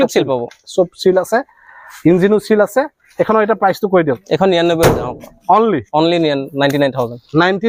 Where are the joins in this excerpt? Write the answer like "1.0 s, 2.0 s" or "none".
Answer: none